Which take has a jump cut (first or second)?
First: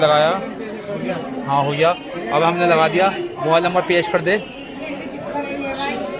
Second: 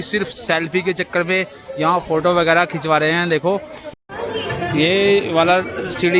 second